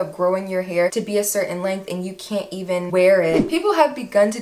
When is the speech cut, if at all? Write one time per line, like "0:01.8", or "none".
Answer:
0:03.4